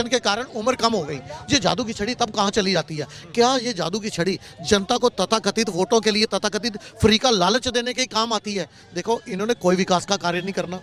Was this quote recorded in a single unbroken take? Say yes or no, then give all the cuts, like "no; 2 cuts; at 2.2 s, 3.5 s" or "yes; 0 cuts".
yes; 0 cuts